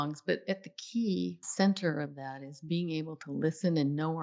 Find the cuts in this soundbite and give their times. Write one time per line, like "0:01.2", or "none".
0:01.5